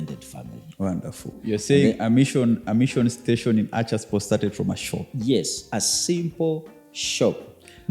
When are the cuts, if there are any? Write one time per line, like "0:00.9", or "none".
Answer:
0:01.4